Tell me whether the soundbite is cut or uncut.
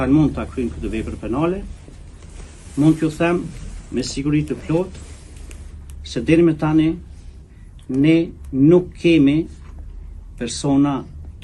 uncut